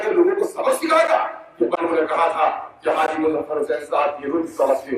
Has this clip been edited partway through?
yes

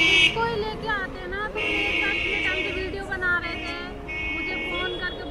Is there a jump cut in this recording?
no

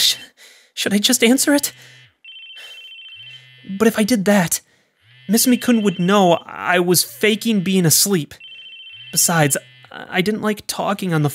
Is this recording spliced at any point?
no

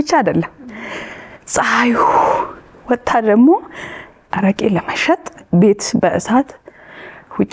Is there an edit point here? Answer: yes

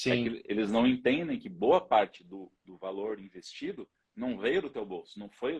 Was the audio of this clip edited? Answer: no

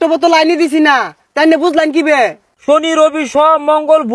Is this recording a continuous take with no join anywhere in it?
no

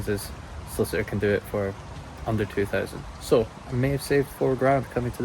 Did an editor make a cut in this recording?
no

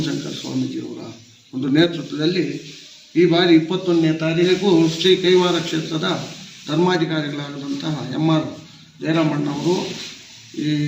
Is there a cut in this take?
yes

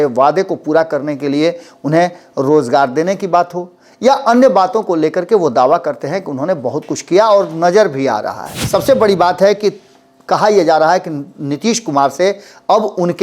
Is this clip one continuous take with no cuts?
no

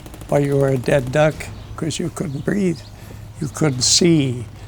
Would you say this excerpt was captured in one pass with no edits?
no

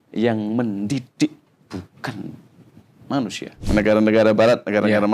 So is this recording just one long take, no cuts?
no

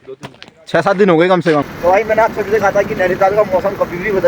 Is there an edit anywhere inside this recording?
yes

